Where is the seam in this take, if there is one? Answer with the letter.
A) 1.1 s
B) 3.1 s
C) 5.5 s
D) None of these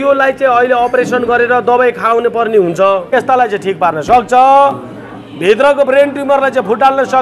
B